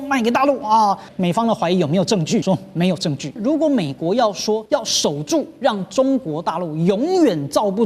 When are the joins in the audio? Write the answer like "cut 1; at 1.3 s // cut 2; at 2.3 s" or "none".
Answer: cut 1; at 1.1 s // cut 2; at 2.4 s // cut 3; at 3.4 s // cut 4; at 4.6 s